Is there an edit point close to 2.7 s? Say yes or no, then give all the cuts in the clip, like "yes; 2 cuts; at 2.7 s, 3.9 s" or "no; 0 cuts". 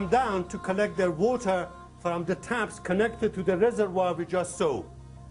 yes; 1 cut; at 2.7 s